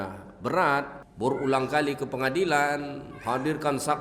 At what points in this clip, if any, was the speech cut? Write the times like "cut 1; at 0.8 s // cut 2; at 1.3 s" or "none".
cut 1; at 1.0 s